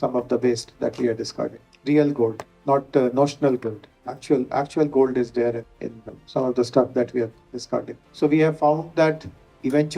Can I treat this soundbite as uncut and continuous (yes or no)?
no